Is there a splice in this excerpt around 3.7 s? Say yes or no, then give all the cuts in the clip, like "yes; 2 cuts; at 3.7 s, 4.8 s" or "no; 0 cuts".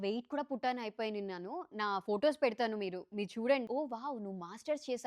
yes; 1 cut; at 3.7 s